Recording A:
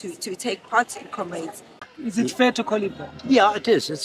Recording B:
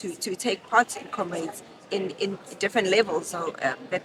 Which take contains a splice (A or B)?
A